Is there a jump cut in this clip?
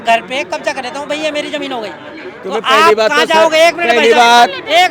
no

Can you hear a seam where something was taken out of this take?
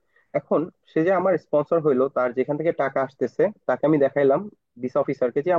no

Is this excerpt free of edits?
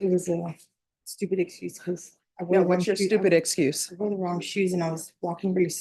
yes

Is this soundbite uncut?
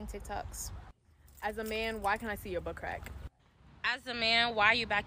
no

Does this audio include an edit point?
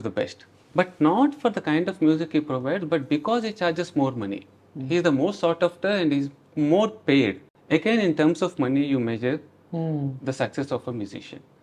no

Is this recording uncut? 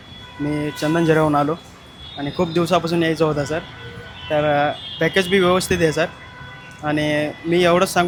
yes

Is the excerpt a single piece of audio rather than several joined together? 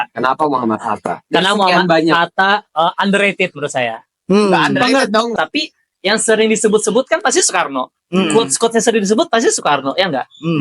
no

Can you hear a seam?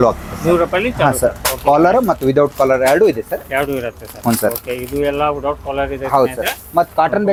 no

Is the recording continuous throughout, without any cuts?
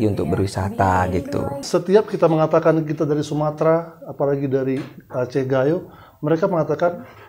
no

